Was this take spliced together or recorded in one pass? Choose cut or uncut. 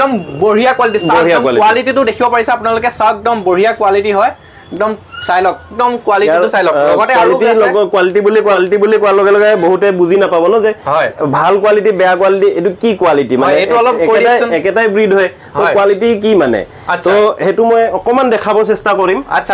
uncut